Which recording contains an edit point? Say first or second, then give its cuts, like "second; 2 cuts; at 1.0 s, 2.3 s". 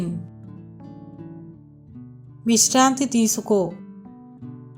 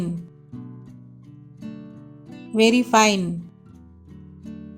first; 3 cuts; at 0.8 s, 2.4 s, 3.8 s